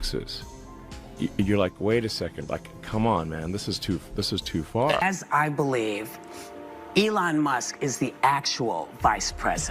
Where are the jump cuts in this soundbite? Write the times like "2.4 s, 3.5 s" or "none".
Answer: 5.0 s